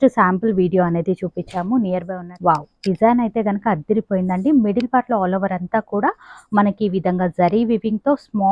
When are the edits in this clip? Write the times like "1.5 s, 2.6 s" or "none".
2.2 s